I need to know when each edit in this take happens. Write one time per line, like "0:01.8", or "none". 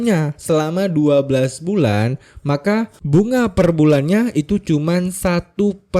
0:03.0